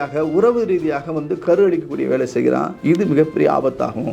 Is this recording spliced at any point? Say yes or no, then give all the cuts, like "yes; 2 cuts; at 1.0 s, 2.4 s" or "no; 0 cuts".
yes; 1 cut; at 2.7 s